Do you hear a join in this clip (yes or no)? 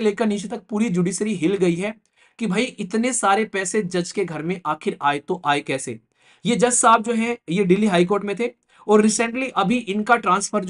no